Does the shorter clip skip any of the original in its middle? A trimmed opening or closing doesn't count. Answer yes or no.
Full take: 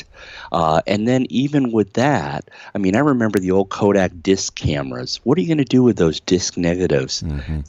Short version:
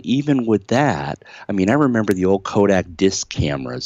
no